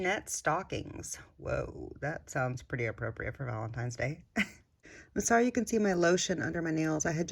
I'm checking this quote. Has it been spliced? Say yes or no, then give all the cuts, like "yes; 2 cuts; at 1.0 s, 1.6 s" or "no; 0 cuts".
yes; 1 cut; at 4.7 s